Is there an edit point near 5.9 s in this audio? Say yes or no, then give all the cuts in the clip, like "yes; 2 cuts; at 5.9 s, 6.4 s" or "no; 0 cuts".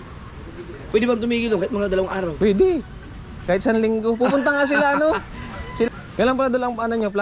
yes; 1 cut; at 5.9 s